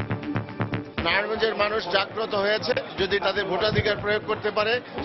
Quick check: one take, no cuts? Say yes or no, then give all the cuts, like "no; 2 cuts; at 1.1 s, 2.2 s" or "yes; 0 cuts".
no; 2 cuts; at 0.9 s, 3.2 s